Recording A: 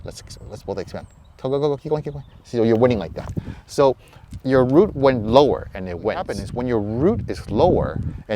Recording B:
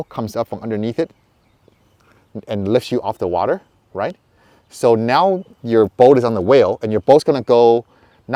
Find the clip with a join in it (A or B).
A